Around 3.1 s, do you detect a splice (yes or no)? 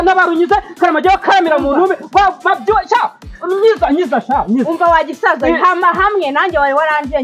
no